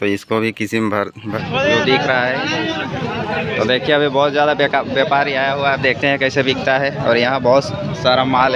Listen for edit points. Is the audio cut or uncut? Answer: cut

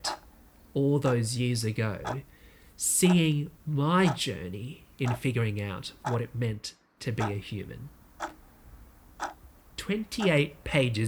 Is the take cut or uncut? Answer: cut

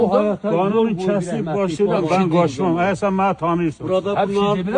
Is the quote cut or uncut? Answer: uncut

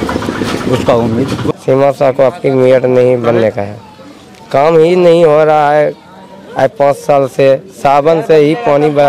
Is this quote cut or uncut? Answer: cut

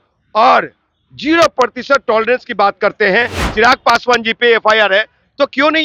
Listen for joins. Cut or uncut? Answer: cut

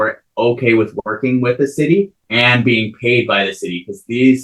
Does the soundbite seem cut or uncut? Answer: cut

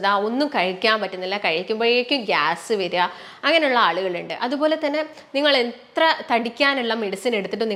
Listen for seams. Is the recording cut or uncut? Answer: uncut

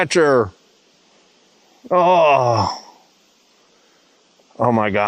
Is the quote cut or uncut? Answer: uncut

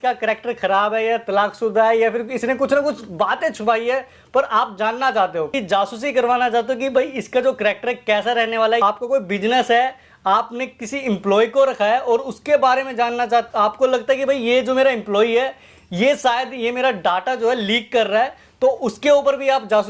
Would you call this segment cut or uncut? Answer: cut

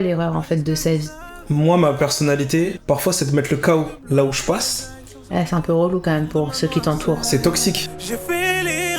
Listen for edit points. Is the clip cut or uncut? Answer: cut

